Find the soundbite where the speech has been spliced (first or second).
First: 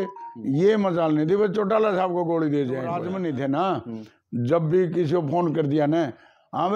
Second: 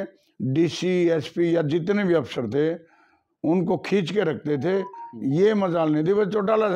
first